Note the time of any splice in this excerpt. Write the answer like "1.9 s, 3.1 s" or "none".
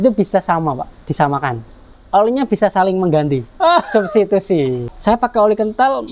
1.9 s, 4.8 s